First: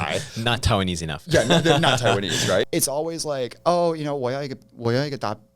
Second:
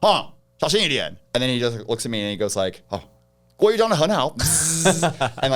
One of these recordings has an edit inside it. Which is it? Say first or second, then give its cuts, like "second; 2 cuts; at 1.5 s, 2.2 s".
first; 1 cut; at 2.7 s